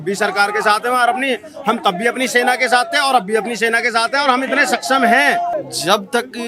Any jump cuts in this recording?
yes; 1 cut; at 5.5 s

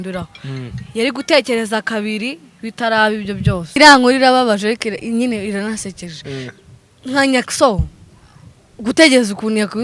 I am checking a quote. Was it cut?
yes; 1 cut; at 3.7 s

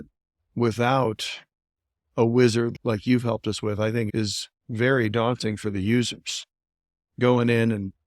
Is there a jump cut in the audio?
yes; 2 cuts; at 2.7 s, 4.1 s

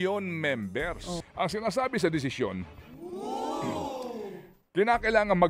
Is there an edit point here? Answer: yes; 1 cut; at 1.2 s

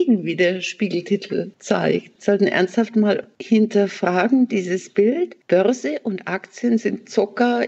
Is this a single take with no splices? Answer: no; 3 cuts; at 1.8 s, 3.3 s, 5.4 s

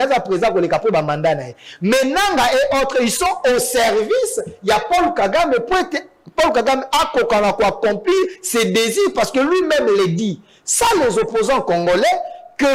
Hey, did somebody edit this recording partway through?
no; 0 cuts

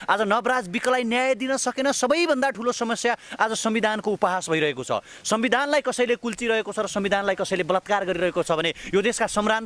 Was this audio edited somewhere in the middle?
no; 0 cuts

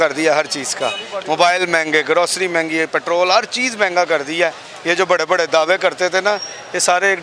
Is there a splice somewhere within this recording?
no; 0 cuts

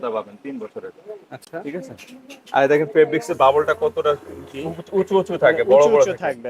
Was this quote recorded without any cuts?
yes; 0 cuts

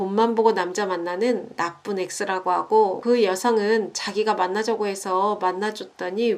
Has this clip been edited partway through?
yes; 1 cut; at 3.0 s

